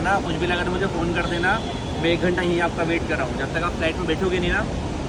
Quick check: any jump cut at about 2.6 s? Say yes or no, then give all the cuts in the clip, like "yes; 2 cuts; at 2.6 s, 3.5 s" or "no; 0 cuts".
no; 0 cuts